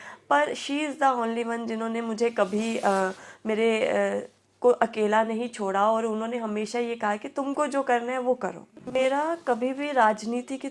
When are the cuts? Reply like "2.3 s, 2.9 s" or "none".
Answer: 8.9 s